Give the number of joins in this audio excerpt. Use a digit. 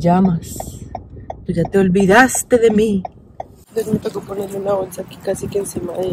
1